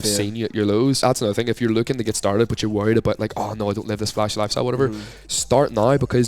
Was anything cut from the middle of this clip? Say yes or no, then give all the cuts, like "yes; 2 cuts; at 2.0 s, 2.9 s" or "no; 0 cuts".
yes; 1 cut; at 1.0 s